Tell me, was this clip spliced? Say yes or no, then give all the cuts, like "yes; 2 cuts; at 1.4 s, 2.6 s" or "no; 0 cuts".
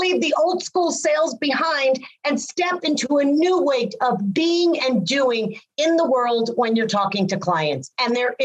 no; 0 cuts